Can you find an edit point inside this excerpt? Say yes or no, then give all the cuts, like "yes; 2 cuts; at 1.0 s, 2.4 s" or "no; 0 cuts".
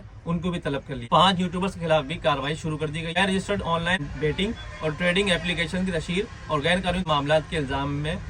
yes; 2 cuts; at 1.0 s, 3.1 s